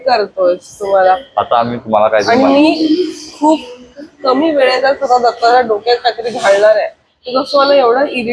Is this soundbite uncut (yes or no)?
yes